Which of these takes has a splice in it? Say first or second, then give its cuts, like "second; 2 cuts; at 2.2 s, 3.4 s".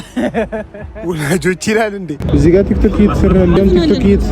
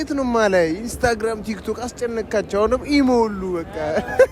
first; 2 cuts; at 2.2 s, 3.6 s